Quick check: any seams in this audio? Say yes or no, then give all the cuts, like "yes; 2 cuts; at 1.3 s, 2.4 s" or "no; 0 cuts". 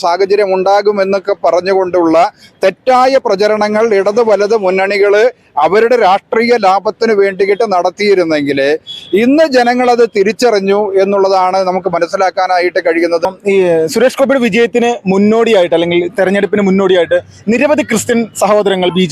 yes; 1 cut; at 13.2 s